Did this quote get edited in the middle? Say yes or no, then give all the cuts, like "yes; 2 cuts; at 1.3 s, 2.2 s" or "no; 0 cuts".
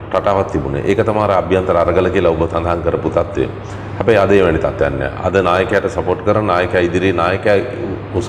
no; 0 cuts